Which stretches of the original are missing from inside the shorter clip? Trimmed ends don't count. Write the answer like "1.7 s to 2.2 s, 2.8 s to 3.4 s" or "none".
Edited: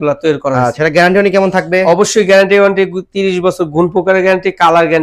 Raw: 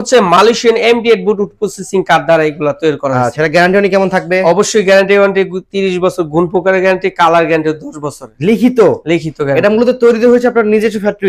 none